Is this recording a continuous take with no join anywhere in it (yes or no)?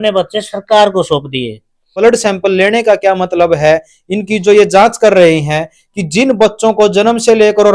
no